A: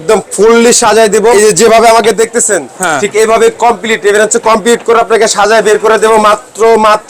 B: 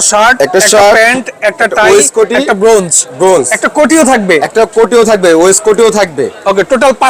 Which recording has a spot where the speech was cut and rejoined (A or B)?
A